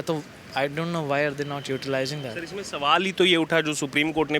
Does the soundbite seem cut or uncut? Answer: uncut